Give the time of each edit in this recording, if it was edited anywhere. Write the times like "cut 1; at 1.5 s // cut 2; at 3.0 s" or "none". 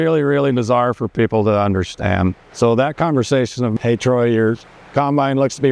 cut 1; at 2.4 s